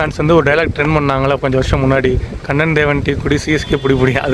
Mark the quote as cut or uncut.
uncut